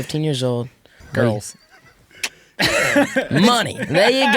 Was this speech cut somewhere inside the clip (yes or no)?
yes